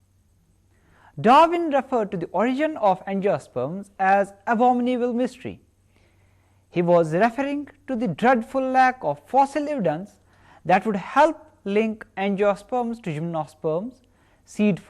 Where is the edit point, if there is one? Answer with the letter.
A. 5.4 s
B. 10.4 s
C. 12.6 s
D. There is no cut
A